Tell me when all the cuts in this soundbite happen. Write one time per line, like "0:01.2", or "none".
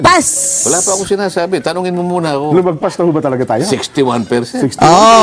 none